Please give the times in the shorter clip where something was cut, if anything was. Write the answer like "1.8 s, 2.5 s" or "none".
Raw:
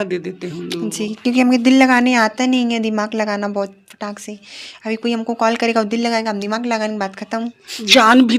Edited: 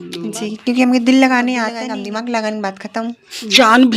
1.8 s